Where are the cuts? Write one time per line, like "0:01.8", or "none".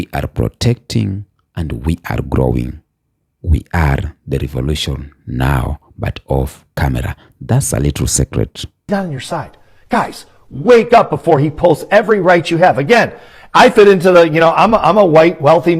0:08.9